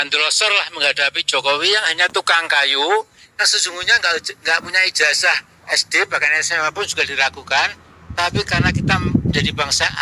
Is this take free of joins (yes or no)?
yes